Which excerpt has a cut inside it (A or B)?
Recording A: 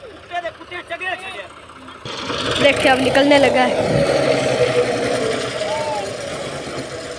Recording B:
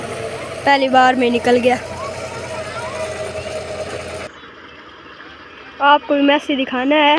B